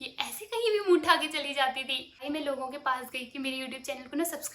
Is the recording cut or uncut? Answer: cut